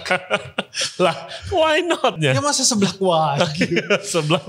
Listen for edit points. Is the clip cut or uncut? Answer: cut